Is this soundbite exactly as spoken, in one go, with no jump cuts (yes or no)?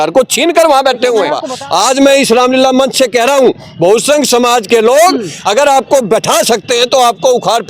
no